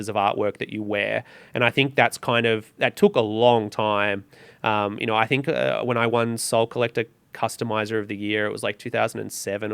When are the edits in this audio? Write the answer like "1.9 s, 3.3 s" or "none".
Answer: none